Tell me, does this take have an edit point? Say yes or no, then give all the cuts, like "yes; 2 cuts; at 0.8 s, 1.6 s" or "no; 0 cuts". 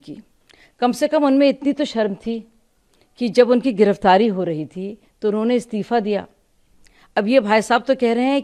no; 0 cuts